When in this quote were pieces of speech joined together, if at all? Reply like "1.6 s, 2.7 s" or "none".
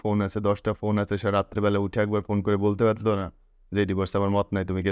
none

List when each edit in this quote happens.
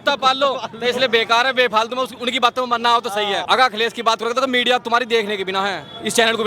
3.4 s

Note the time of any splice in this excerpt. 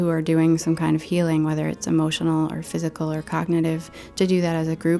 none

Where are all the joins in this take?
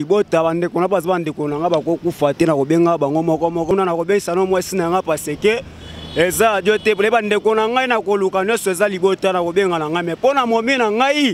3.7 s

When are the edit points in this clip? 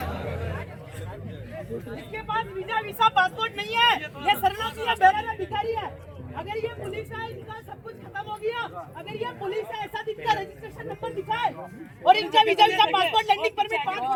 none

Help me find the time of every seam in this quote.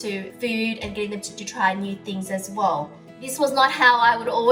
none

